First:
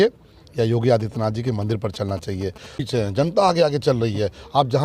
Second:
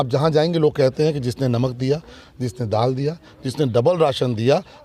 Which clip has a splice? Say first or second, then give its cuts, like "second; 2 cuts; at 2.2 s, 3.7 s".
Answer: first; 1 cut; at 2.8 s